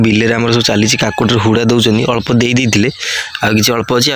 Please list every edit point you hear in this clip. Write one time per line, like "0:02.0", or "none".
none

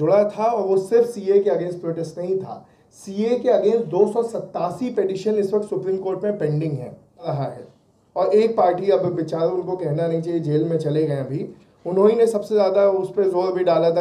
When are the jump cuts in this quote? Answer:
0:07.3

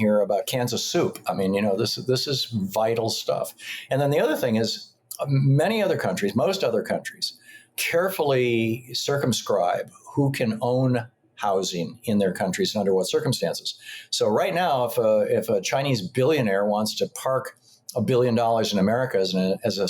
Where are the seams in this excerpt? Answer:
none

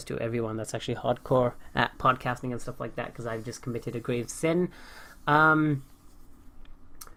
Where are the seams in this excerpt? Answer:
none

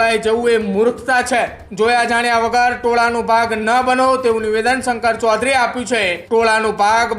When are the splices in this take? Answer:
0:01.6
0:06.2

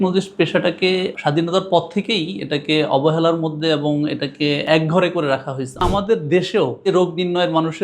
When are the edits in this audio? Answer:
0:01.1
0:04.7
0:05.8
0:06.9

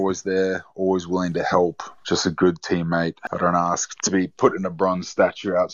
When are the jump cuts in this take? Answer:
0:01.9
0:03.2

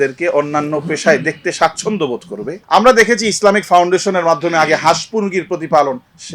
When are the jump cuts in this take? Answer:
0:02.6

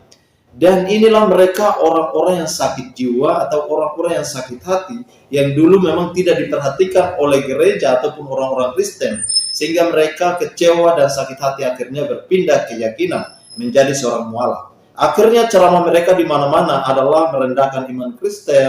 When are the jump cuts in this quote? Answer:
none

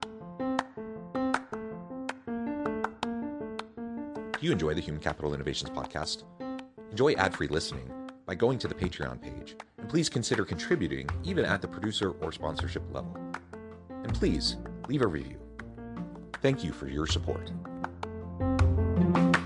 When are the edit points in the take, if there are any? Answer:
none

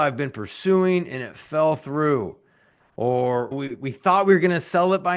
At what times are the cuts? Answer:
0:03.5

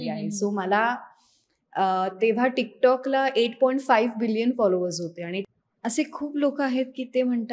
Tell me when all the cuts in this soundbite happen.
0:05.4

